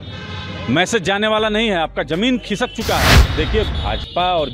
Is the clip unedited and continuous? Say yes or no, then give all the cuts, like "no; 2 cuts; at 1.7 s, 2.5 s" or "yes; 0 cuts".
no; 1 cut; at 3.3 s